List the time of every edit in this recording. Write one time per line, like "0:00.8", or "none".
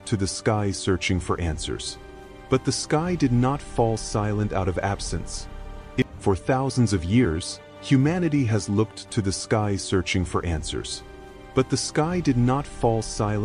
0:06.1